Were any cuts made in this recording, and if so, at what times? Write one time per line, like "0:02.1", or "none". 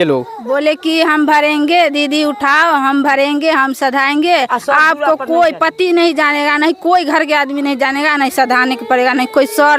none